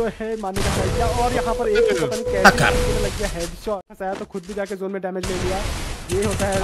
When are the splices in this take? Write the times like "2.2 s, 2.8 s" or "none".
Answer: 3.8 s